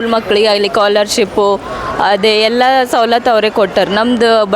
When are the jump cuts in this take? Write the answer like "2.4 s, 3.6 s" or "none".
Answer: none